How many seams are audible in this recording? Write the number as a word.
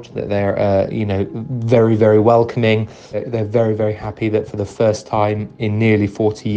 one